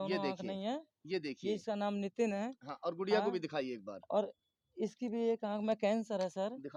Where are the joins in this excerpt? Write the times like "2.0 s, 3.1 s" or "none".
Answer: none